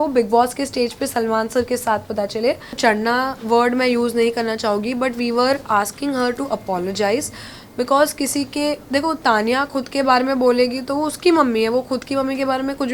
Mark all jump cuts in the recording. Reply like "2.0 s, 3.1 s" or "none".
2.8 s